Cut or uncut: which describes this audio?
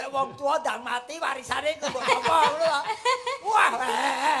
uncut